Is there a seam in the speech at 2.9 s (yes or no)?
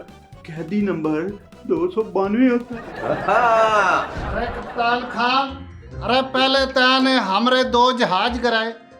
no